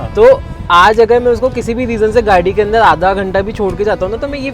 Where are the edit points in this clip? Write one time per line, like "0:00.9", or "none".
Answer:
none